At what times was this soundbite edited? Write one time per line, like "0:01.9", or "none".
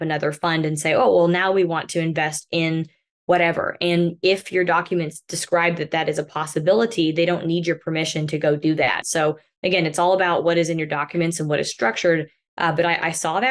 0:09.0